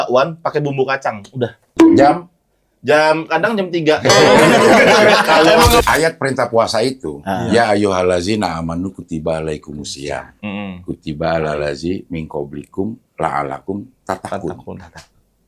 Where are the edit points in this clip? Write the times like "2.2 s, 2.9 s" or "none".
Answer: 1.7 s, 5.8 s